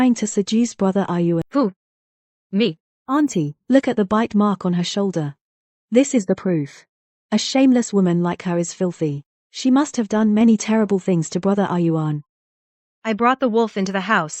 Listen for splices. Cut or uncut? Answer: cut